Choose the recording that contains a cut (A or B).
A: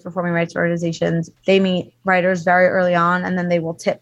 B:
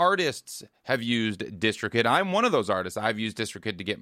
A